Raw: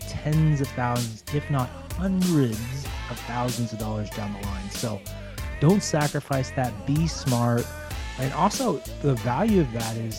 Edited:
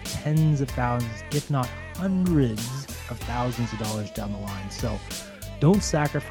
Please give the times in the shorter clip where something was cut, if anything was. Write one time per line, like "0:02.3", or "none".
none